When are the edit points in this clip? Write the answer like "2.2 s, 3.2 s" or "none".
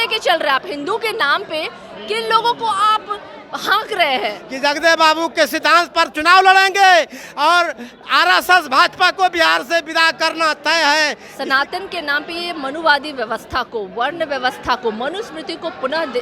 4.4 s, 11.3 s